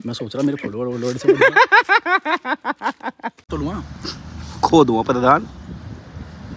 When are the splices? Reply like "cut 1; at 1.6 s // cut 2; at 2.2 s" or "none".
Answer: cut 1; at 3.5 s